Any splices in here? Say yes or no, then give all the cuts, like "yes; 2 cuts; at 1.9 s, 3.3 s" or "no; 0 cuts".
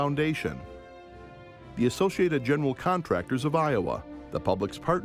no; 0 cuts